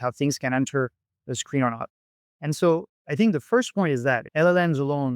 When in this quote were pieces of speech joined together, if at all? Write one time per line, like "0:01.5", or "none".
0:04.2